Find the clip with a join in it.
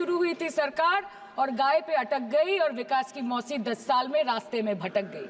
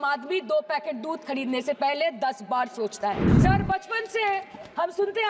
second; 1 cut; at 3.3 s

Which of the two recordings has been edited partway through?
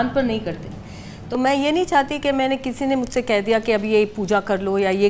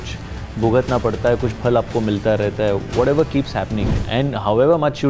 second; 1 cut; at 4.0 s

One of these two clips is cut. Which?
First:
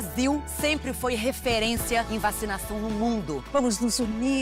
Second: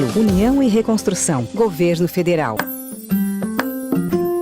second; 1 cut; at 2.6 s

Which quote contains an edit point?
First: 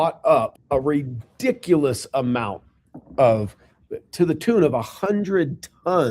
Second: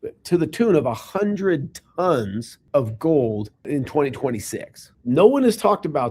second; 1 cut; at 4.9 s

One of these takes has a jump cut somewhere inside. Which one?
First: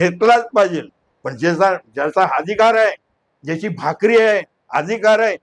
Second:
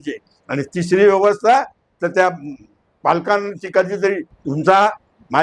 second; 1 cut; at 4.3 s

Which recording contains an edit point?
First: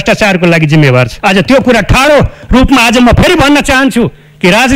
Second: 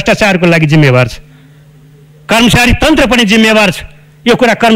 first; 1 cut; at 1.1 s

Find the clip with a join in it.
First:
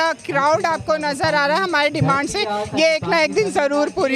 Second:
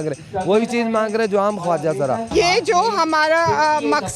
second; 1 cut; at 2.3 s

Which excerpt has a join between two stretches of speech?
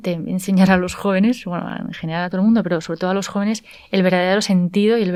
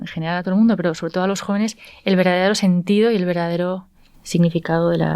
second; 1 cut; at 4.2 s

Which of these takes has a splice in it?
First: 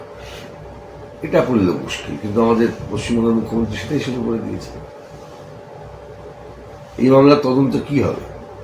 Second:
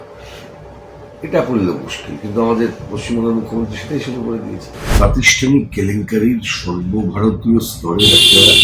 second; 1 cut; at 4.8 s

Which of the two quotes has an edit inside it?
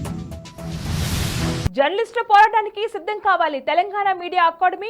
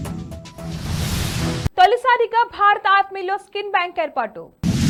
first; 1 cut; at 1.2 s

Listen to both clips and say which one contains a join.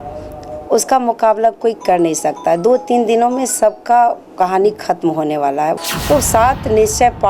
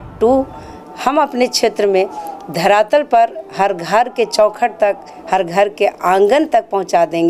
first; 1 cut; at 5.8 s

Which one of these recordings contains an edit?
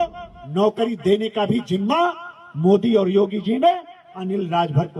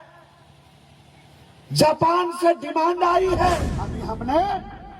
second; 1 cut; at 4.0 s

